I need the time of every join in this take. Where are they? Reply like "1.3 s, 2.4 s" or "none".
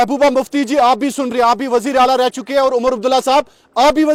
none